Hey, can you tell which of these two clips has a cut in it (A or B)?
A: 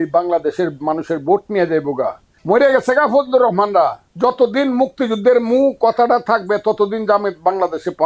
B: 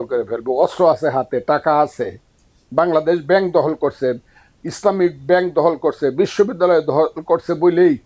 A